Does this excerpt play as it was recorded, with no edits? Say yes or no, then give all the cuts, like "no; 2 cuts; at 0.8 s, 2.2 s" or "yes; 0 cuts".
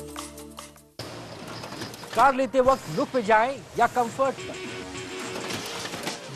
no; 1 cut; at 1.0 s